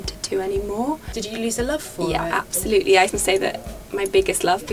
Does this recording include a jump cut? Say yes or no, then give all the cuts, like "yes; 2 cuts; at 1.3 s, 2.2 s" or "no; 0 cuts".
yes; 2 cuts; at 1.1 s, 3.1 s